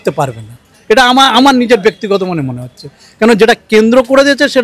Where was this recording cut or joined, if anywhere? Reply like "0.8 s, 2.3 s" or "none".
none